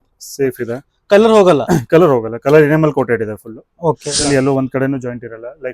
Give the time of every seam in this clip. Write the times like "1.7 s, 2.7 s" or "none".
4.3 s